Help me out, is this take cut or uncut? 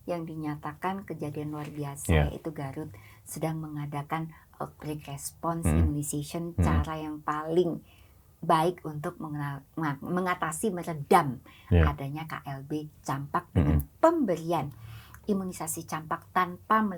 uncut